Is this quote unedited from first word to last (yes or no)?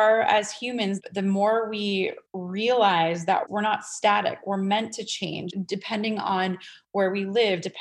no